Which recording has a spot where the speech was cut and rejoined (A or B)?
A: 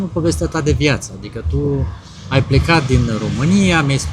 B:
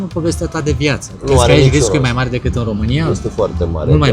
B